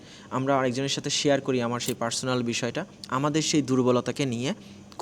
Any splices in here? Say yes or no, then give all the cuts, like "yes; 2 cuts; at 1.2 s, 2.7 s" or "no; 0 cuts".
yes; 1 cut; at 2.9 s